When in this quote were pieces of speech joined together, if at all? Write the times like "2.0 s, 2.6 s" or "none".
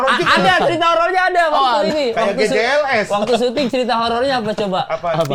none